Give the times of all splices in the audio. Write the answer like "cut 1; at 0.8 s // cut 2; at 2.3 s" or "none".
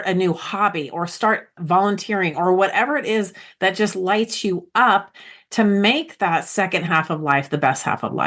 cut 1; at 1.5 s